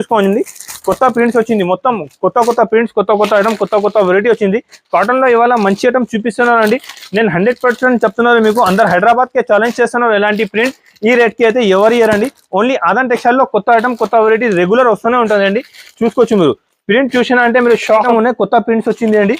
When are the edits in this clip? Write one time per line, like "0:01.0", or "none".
0:18.1

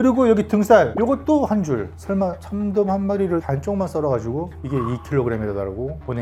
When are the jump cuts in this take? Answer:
none

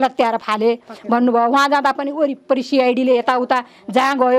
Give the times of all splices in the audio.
none

